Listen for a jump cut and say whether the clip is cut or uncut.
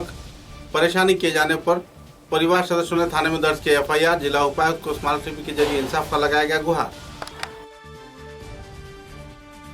uncut